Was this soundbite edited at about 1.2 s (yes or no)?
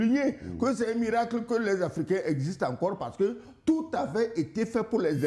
no